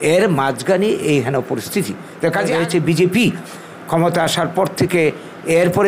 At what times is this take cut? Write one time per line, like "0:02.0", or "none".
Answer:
0:02.5